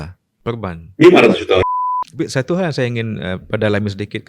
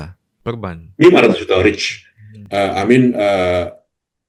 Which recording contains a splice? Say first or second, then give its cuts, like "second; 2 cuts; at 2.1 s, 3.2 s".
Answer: first; 1 cut; at 1.6 s